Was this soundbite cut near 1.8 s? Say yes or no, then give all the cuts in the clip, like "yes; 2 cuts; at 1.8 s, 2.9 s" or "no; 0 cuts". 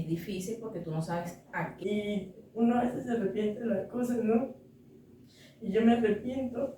yes; 1 cut; at 1.8 s